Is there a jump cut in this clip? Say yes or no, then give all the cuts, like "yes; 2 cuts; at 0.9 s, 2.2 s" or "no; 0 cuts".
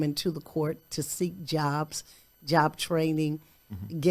no; 0 cuts